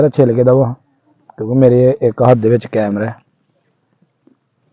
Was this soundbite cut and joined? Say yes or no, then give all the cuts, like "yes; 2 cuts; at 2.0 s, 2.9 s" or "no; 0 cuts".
no; 0 cuts